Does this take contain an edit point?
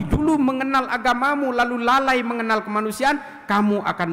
no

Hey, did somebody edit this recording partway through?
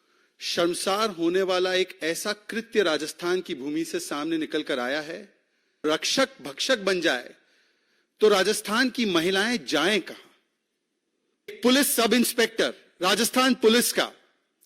yes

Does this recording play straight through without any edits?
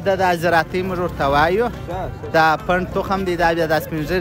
yes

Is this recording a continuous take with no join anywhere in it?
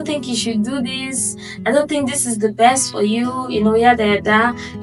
yes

